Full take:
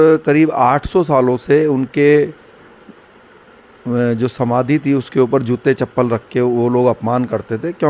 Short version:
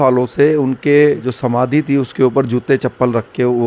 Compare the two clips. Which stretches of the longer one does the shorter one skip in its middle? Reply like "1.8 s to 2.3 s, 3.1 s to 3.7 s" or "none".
2.4 s to 4.3 s